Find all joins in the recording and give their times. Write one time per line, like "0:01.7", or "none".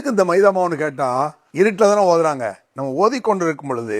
0:01.4